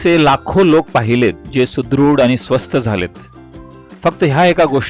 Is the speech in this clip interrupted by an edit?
no; 0 cuts

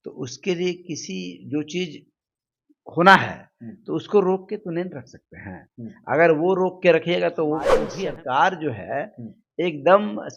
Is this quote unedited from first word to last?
no; 1 cut; at 7.8 s

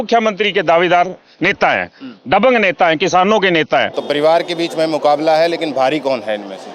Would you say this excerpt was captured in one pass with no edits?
no; 1 cut; at 4.0 s

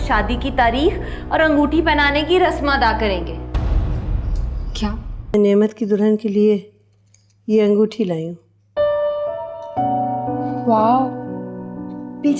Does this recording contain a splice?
yes; 1 cut; at 5.3 s

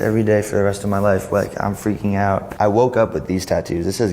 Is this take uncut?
no; 1 cut; at 2.5 s

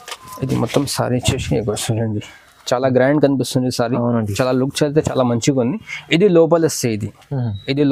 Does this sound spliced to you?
no; 0 cuts

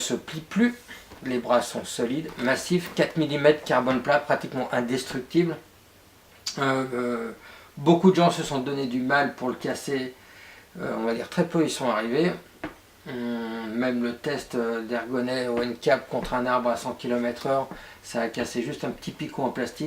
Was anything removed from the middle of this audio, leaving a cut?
yes; 1 cut; at 2.7 s

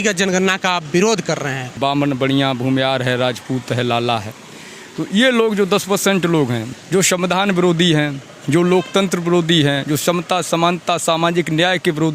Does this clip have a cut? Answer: yes; 2 cuts; at 1.6 s, 6.7 s

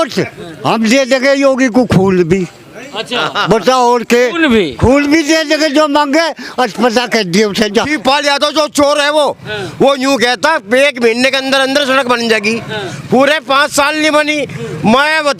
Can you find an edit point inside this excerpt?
yes; 1 cut; at 7.9 s

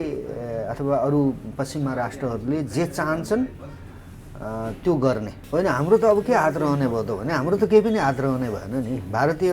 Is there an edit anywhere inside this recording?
yes; 1 cut; at 5.4 s

